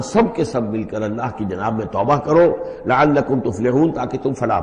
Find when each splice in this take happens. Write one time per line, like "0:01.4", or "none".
none